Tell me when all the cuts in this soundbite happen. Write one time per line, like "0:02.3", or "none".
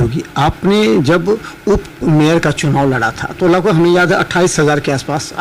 none